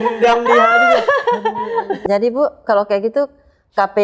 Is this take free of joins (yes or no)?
no